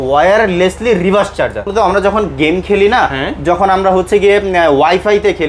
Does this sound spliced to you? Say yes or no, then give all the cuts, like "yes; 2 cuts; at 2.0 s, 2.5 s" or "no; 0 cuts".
yes; 1 cut; at 1.7 s